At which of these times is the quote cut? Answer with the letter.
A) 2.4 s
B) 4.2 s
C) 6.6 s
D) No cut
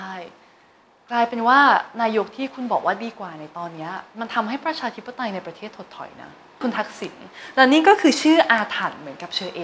C